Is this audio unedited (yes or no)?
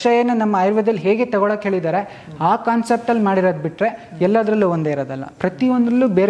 yes